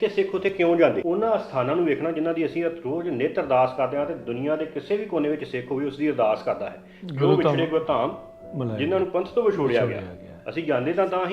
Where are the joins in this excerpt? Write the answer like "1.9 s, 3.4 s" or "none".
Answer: 1.0 s